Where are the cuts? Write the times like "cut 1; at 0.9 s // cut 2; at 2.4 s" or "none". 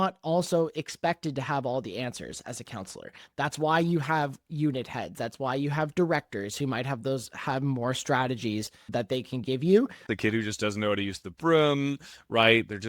cut 1; at 10.1 s